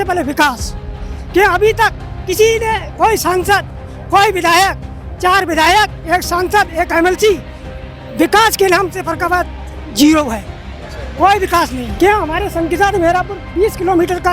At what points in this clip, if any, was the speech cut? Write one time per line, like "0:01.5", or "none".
0:11.8